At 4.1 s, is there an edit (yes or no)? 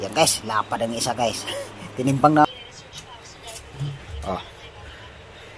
no